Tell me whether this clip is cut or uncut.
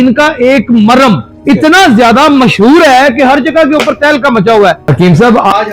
cut